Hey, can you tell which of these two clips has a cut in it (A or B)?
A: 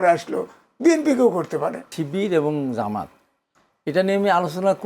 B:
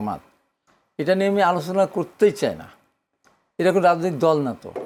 A